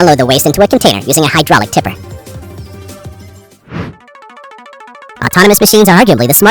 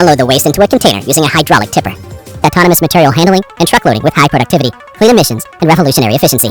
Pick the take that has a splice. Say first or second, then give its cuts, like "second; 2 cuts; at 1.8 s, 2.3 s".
second; 1 cut; at 2.4 s